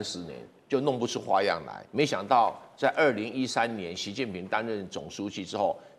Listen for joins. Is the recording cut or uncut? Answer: cut